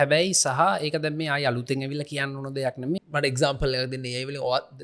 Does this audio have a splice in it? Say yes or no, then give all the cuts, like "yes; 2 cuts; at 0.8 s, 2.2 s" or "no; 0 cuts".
yes; 1 cut; at 3.0 s